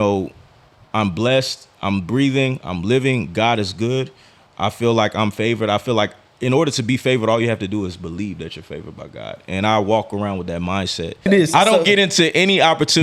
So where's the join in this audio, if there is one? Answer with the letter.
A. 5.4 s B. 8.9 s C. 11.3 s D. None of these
C